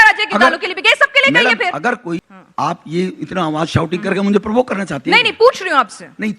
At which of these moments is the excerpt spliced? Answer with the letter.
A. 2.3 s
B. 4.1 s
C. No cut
A